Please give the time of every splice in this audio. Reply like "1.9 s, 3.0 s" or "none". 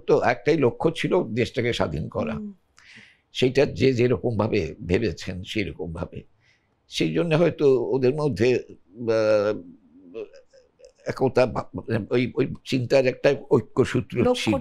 none